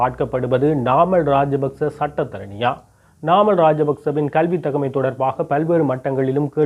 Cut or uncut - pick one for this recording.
cut